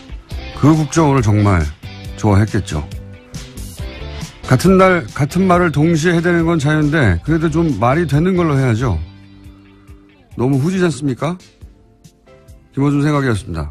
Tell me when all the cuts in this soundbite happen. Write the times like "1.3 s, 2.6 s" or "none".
12.6 s